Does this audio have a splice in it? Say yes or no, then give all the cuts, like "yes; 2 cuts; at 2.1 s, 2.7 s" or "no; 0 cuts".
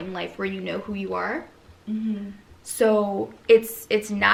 no; 0 cuts